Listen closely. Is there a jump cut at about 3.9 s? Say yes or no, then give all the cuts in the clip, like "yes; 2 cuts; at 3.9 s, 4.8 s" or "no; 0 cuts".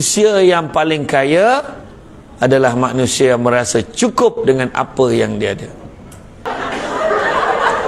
no; 1 cut; at 6.5 s